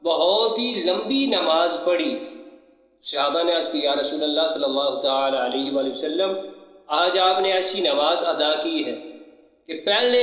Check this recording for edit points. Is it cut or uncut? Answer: uncut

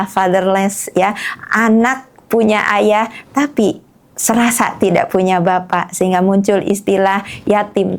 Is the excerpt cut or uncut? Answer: uncut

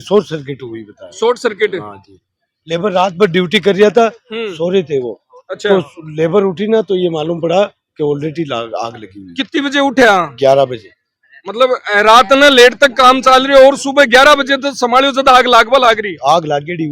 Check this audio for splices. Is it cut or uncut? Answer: uncut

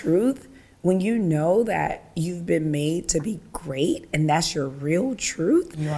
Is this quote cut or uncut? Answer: uncut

